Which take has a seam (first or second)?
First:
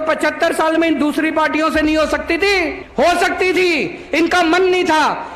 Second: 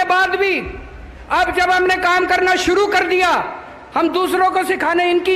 first